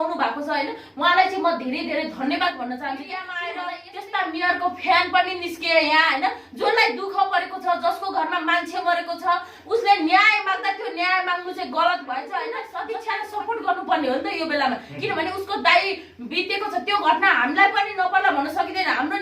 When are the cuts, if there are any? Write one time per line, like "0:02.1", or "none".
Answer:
0:03.4
0:12.7